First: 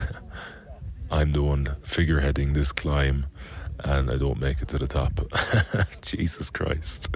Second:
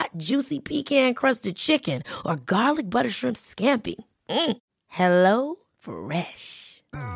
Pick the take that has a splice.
first; 1 cut; at 1.7 s

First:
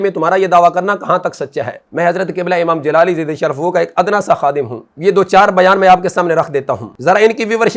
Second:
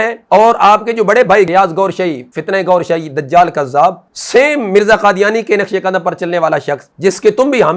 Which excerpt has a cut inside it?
first; 2 cuts; at 1.9 s, 4.8 s

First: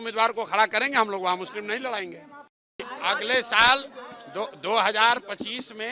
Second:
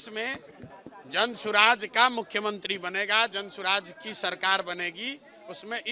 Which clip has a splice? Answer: first; 1 cut; at 2.9 s

